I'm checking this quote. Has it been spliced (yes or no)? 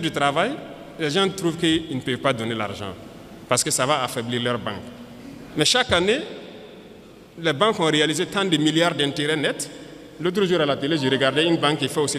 no